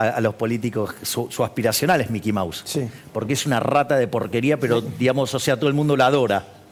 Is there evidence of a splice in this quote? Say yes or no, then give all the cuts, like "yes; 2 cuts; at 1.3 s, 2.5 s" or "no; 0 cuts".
no; 0 cuts